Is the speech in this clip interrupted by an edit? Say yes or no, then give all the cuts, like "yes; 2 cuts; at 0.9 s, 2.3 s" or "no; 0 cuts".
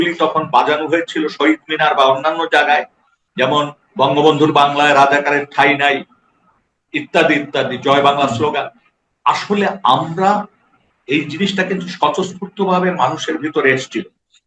no; 0 cuts